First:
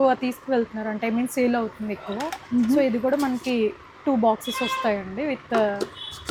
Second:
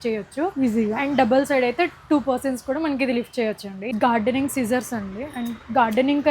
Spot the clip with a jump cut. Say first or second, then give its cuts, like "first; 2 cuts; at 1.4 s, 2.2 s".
second; 1 cut; at 3.7 s